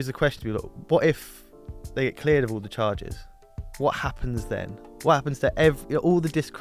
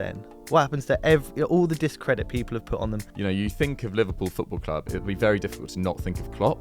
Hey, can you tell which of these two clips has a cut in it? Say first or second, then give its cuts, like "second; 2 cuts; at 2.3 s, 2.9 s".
second; 1 cut; at 3.1 s